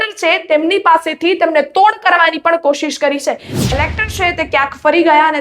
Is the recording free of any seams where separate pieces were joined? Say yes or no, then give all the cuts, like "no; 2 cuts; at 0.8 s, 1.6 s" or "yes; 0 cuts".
no; 1 cut; at 3.7 s